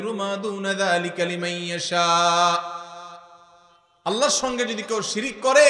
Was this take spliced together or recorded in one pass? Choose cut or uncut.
uncut